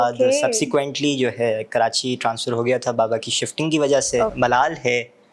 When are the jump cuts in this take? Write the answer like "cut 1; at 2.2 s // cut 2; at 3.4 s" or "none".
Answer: cut 1; at 4.3 s